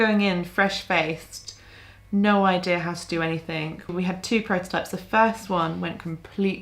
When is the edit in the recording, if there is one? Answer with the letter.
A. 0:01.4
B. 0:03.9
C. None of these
B